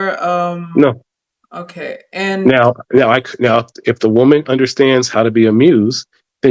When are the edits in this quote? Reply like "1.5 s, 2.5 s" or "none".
none